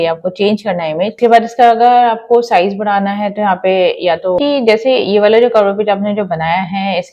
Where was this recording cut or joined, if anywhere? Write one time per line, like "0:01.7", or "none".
0:01.2
0:04.4